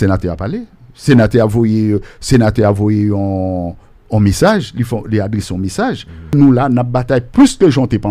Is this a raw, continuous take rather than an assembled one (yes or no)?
no